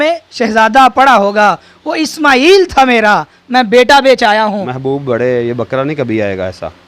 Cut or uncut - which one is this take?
cut